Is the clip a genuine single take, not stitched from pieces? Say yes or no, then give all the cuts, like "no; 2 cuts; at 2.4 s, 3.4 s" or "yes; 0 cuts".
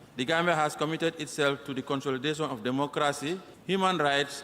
no; 1 cut; at 3.5 s